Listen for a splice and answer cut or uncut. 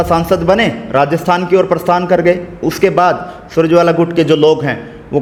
uncut